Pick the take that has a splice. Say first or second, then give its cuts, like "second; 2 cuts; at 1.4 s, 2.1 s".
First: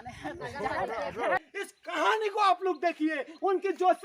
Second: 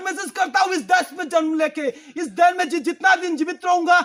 first; 1 cut; at 1.4 s